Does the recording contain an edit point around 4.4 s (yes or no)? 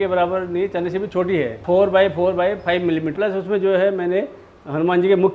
no